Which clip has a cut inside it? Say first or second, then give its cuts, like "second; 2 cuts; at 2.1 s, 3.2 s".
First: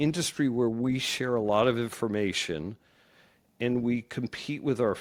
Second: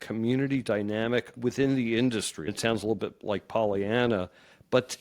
second; 2 cuts; at 1.4 s, 2.4 s